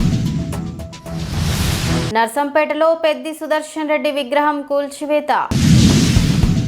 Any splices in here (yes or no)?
yes